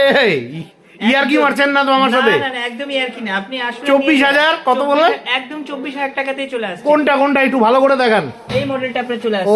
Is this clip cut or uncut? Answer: uncut